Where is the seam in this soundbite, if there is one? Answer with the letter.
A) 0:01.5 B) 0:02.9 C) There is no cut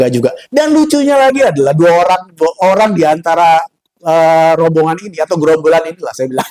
C